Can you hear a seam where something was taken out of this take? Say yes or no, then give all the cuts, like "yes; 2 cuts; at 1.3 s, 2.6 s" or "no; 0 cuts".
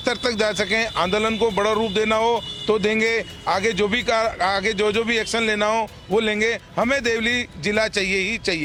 no; 0 cuts